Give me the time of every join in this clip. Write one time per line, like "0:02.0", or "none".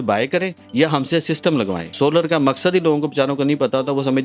0:01.9

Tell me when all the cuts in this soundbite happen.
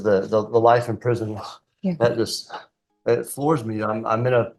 none

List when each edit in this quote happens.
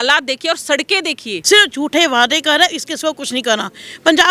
0:01.3

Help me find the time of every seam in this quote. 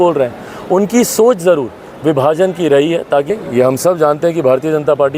0:03.3

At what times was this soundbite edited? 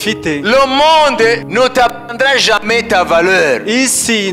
0:01.4

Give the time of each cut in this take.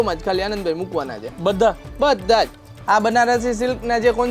0:02.7

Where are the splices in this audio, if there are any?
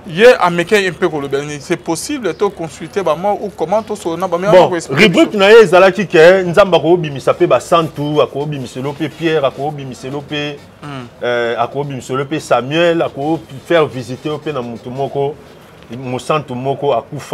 none

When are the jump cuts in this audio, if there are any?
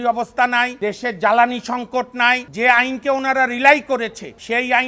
0:02.4

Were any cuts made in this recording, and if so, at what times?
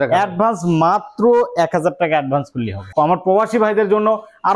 0:02.8

